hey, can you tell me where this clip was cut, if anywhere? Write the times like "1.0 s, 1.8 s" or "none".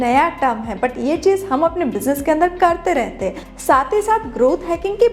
3.4 s